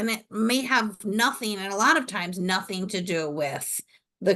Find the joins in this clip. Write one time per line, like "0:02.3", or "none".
none